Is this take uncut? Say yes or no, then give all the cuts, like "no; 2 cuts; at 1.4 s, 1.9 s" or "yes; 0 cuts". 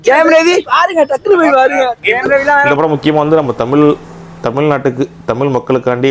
no; 1 cut; at 2.7 s